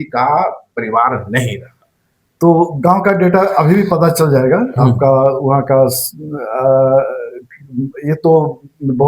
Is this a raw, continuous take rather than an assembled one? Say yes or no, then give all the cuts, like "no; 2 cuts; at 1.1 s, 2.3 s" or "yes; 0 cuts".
yes; 0 cuts